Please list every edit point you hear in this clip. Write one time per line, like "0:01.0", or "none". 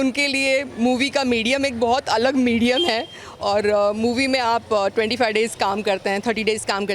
none